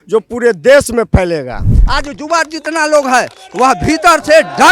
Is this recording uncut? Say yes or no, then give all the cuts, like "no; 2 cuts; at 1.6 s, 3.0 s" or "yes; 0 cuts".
no; 1 cut; at 1.8 s